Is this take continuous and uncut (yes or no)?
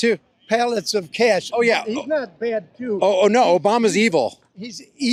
yes